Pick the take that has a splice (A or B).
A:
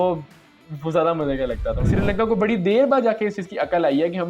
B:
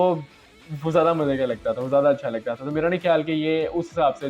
A